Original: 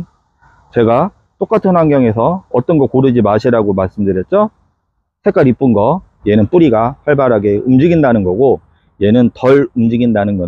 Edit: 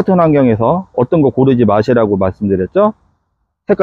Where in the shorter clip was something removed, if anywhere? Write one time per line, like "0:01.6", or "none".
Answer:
none